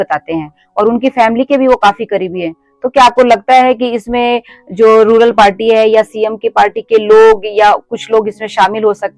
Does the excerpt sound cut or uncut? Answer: uncut